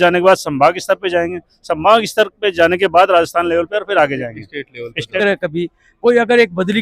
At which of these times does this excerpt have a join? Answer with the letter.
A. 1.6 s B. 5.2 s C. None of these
B